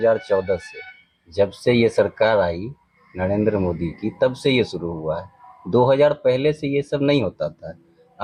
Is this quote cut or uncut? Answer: uncut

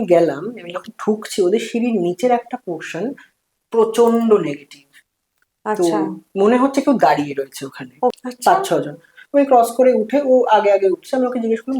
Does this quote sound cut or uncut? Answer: cut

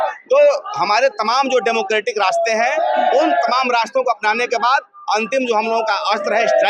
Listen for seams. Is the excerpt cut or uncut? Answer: uncut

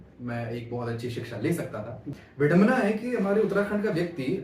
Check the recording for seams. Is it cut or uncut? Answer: cut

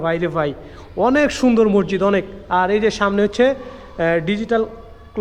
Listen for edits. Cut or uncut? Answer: uncut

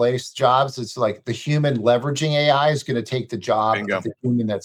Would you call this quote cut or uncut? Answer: uncut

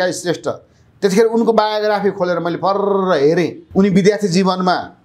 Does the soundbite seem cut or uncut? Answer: cut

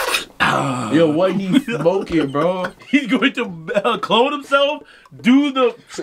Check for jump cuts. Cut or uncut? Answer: cut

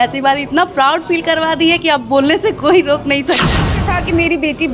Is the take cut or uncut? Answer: cut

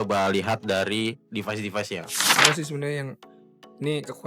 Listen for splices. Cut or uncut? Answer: cut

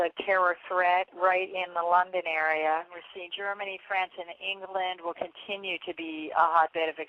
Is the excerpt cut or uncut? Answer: uncut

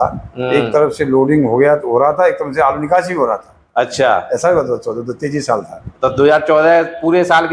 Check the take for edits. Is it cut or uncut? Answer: uncut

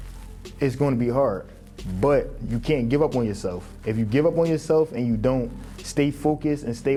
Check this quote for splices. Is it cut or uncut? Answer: uncut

